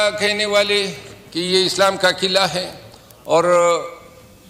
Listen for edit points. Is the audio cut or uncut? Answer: uncut